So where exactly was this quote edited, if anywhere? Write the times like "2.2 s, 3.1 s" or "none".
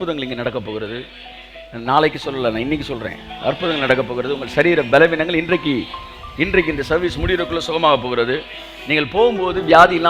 none